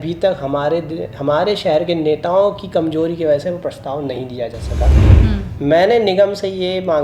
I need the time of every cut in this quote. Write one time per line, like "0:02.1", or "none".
0:05.0